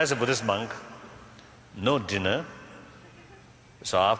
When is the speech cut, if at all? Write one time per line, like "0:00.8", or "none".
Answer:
0:03.0